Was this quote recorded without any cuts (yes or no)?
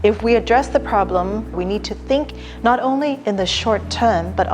no